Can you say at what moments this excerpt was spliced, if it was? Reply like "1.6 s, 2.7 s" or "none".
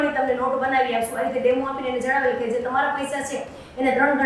none